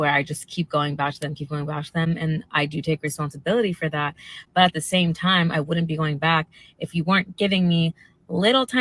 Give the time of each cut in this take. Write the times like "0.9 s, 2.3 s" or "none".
none